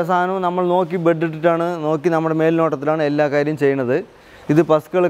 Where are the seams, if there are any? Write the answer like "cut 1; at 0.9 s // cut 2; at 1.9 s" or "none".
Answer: none